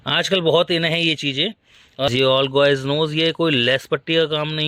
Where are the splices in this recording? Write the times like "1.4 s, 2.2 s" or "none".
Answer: 2.1 s